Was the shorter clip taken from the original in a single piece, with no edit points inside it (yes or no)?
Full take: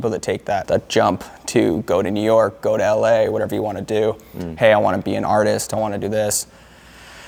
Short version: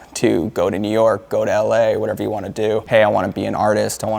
no